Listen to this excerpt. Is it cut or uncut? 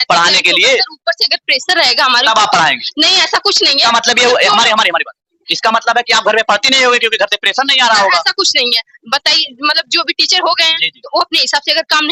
uncut